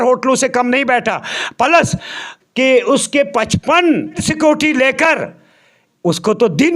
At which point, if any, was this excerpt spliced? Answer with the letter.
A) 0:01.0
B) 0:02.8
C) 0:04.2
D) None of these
C